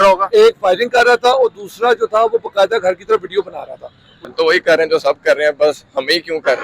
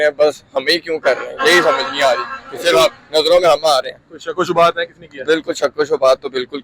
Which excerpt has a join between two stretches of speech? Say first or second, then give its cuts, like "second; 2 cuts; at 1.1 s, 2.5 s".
first; 1 cut; at 4.3 s